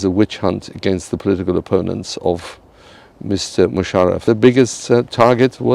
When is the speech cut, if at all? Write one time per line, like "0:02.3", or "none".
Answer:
0:04.2